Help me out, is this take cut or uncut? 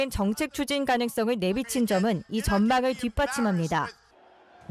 uncut